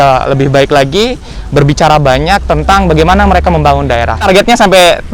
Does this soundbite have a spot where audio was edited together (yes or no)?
yes